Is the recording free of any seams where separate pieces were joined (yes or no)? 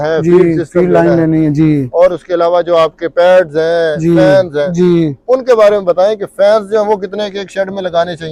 yes